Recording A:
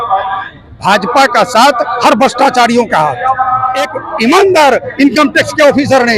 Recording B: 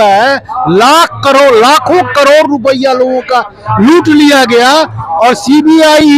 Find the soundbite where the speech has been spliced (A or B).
A